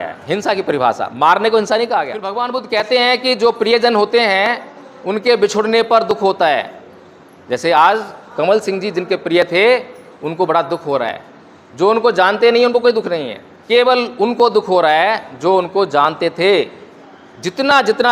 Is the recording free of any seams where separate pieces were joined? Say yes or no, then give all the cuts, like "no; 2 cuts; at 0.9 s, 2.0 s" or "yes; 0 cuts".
no; 1 cut; at 2.2 s